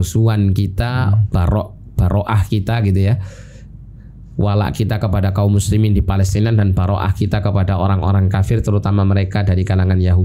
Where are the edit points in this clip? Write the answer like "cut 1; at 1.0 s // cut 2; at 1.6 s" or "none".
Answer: none